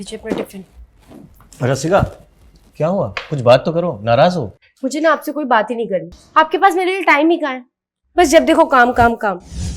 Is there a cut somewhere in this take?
yes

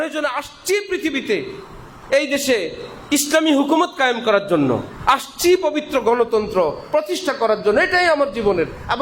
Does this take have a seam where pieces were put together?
no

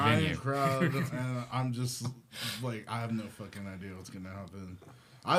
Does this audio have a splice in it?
no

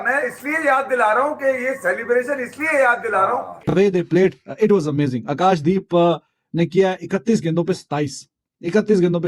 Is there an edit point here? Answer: yes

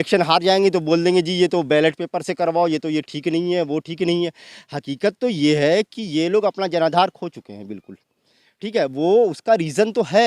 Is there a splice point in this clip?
no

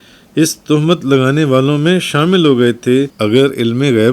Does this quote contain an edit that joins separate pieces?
yes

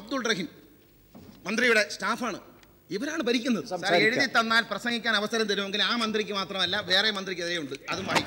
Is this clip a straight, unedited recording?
no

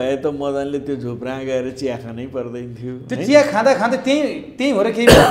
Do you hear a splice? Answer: no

